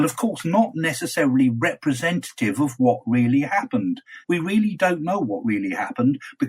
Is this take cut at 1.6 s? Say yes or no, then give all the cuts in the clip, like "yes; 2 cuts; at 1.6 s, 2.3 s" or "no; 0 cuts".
no; 1 cut; at 4.1 s